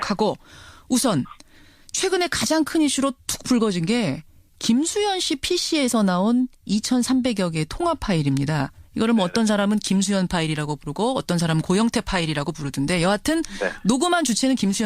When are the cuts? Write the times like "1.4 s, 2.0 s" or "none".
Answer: 2.2 s

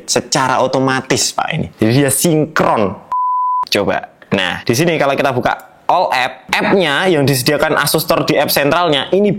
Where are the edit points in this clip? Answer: 3.1 s

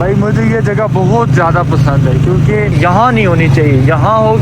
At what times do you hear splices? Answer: 2.7 s

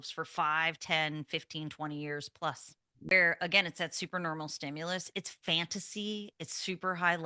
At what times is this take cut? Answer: 3.1 s

